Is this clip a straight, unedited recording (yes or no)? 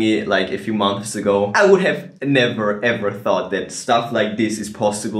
no